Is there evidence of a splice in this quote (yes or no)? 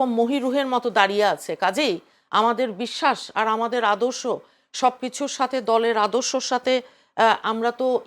no